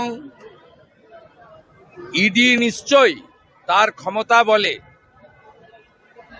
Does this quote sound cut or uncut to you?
uncut